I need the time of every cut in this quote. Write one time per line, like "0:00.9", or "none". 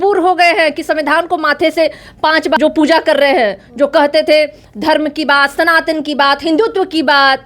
0:02.6